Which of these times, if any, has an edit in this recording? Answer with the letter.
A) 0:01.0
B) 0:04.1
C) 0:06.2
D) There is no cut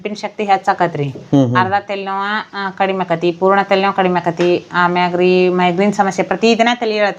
D